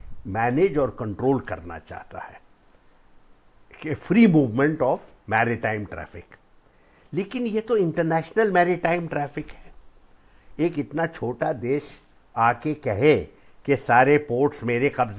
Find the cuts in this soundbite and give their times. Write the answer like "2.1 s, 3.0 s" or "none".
none